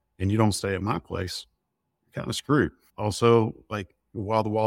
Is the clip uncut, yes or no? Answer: no